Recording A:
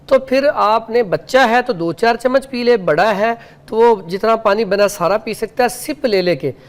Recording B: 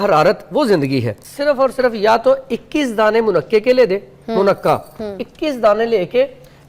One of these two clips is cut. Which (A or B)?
B